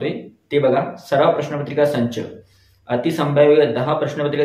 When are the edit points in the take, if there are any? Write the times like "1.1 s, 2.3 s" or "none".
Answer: none